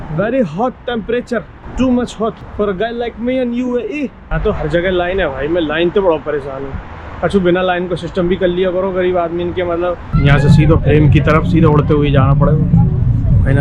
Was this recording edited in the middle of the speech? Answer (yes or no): yes